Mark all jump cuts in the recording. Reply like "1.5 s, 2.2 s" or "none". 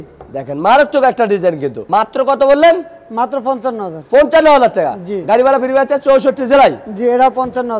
none